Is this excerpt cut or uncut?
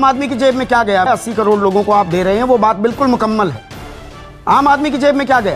cut